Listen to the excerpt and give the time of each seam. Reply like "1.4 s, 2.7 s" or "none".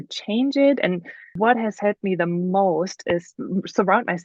1.4 s, 3.4 s